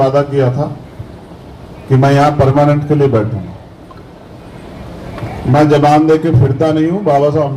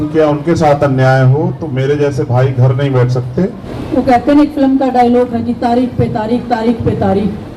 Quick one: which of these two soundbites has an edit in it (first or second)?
second